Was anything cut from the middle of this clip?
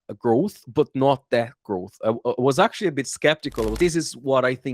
yes; 1 cut; at 3.8 s

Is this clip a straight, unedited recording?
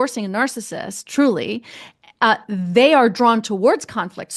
yes; 0 cuts

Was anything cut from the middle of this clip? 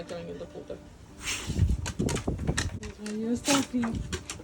yes; 1 cut; at 2.8 s

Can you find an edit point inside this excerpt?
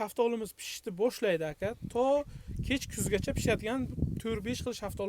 no; 0 cuts

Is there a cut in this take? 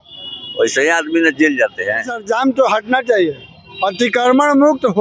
yes; 1 cut; at 2.2 s

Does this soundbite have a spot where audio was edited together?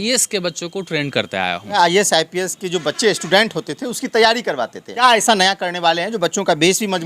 yes; 2 cuts; at 1.8 s, 4.9 s

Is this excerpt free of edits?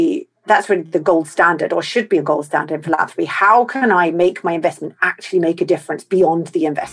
yes; 0 cuts

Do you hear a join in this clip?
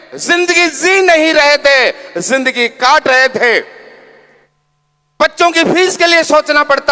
no; 0 cuts

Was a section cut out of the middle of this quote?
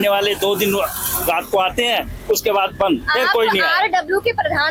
no; 0 cuts

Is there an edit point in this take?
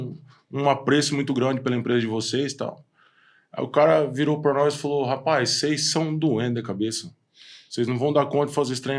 no; 0 cuts

